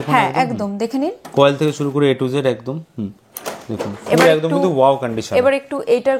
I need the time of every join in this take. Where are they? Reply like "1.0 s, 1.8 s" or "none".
none